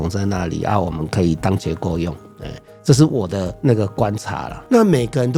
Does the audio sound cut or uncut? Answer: uncut